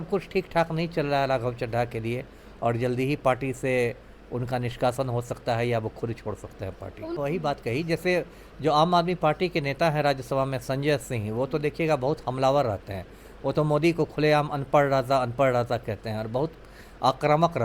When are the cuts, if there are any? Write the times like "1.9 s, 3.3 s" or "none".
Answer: 7.2 s